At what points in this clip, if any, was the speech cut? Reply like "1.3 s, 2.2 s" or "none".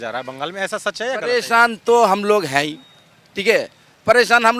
none